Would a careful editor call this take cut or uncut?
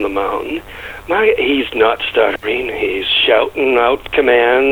uncut